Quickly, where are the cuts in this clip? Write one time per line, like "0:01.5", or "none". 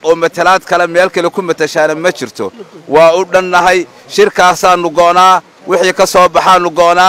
none